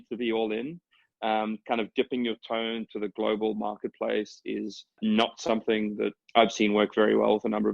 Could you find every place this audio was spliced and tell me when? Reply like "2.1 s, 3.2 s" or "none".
5.0 s, 6.2 s